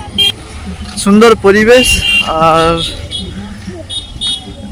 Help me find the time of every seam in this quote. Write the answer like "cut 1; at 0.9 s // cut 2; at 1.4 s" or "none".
none